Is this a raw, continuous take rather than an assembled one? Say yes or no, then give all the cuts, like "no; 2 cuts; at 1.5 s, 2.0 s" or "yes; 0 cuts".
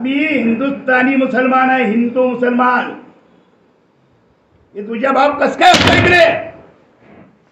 yes; 0 cuts